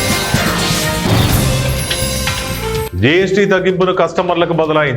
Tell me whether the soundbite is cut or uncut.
cut